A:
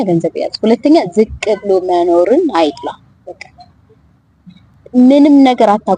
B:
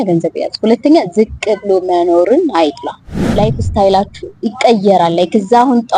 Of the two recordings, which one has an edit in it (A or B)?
B